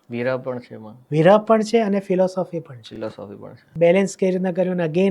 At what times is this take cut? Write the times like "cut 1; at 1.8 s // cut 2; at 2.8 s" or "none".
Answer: cut 1; at 3.6 s